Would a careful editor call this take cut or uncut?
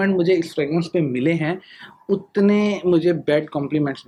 uncut